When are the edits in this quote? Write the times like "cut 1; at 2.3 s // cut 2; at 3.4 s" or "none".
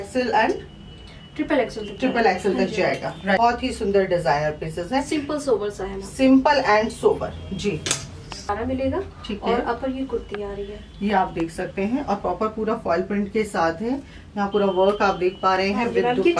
cut 1; at 3.4 s // cut 2; at 8.5 s